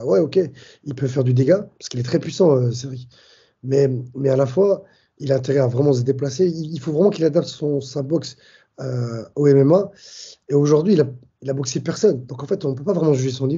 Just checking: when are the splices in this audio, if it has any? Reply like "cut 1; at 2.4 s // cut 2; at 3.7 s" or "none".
none